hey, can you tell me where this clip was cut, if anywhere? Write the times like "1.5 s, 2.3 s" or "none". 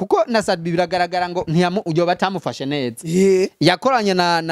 none